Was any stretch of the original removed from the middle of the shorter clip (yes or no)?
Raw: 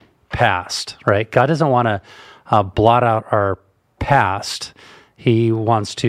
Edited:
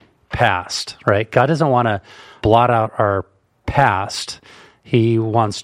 yes